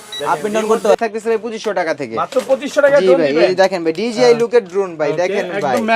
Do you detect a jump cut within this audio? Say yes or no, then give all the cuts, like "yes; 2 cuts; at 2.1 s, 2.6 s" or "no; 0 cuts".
yes; 1 cut; at 1.0 s